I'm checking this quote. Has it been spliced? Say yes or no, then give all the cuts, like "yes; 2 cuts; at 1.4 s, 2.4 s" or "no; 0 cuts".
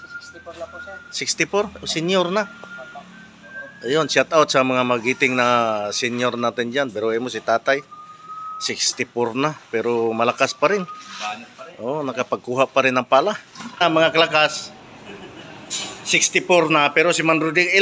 yes; 1 cut; at 13.8 s